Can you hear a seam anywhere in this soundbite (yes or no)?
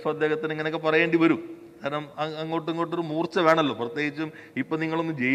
no